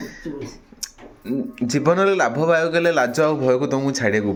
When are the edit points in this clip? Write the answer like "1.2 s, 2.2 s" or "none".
none

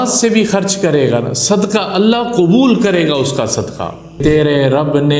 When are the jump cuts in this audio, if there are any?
4.2 s

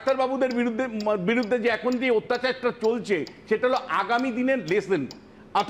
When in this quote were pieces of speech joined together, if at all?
none

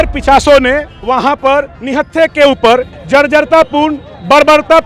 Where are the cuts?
0.9 s, 1.8 s, 2.9 s

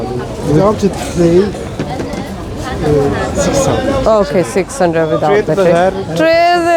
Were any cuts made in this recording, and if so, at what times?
none

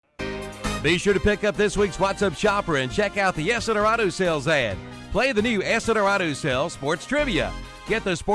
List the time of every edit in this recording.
1.0 s

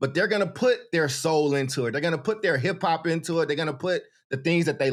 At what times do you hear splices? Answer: none

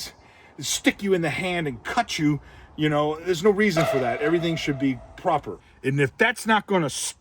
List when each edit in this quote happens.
5.6 s

